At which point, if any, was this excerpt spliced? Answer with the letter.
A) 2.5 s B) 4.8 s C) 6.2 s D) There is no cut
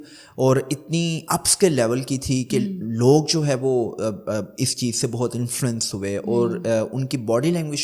D